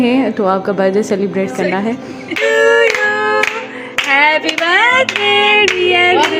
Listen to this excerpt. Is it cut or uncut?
cut